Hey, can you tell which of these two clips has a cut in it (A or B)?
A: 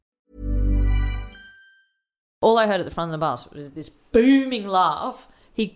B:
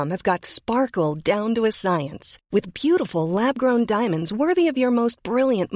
A